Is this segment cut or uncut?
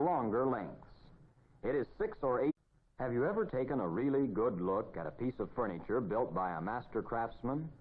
uncut